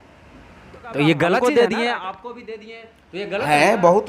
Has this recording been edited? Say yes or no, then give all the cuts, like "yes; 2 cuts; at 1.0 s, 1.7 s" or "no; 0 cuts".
yes; 1 cut; at 1.4 s